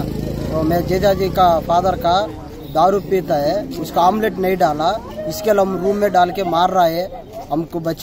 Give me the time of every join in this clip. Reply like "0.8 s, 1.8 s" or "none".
none